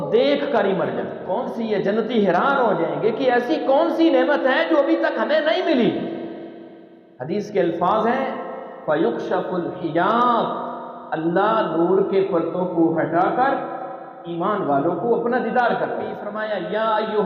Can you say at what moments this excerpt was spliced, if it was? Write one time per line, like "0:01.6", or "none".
0:01.2
0:16.3